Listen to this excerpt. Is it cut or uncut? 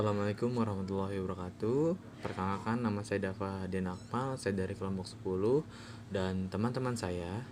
uncut